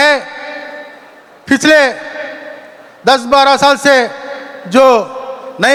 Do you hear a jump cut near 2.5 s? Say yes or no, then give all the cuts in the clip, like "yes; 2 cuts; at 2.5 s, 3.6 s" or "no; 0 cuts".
no; 0 cuts